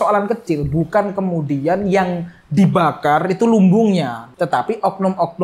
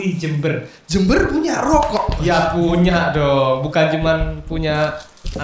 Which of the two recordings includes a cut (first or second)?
first